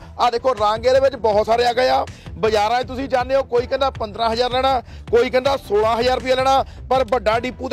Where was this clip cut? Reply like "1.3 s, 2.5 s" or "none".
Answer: none